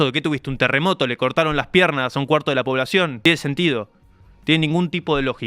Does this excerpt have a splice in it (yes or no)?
yes